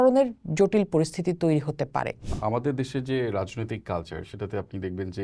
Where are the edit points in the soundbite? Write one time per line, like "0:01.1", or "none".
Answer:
0:02.2